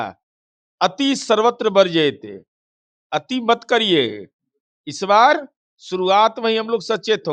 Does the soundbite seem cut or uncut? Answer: uncut